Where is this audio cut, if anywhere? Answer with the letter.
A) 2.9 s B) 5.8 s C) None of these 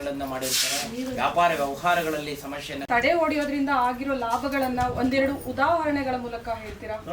A